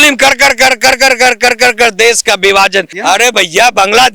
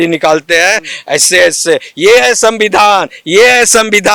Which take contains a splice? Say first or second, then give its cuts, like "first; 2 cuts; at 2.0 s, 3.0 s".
first; 1 cut; at 2.9 s